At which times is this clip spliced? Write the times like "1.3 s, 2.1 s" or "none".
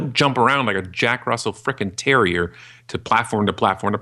none